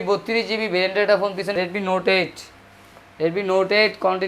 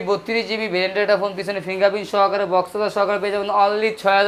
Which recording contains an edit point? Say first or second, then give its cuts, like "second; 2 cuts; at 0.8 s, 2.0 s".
first; 1 cut; at 1.5 s